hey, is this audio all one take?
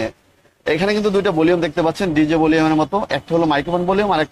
yes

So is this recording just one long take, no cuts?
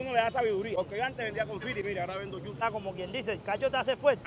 no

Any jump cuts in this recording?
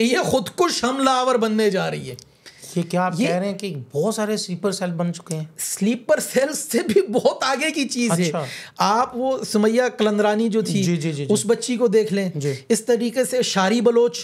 no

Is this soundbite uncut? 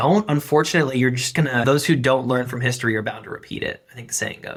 yes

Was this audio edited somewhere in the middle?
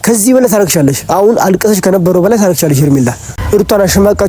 yes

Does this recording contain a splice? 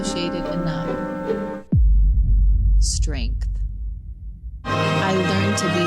yes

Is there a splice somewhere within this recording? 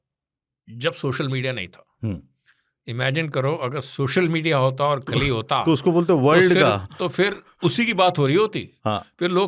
no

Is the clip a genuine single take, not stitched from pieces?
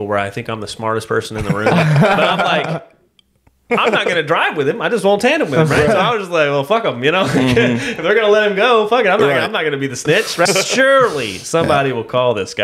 no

